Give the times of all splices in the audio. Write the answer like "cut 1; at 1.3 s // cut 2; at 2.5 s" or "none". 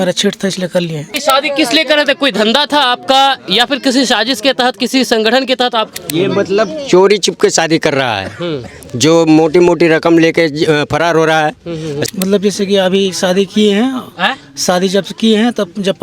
cut 1; at 1.1 s // cut 2; at 5.9 s // cut 3; at 12.1 s